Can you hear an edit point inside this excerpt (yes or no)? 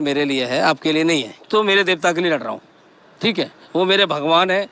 yes